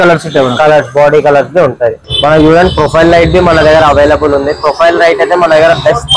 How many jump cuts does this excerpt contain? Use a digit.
1